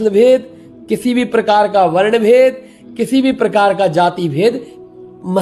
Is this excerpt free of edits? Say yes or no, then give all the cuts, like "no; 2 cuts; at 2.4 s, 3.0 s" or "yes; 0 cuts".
yes; 0 cuts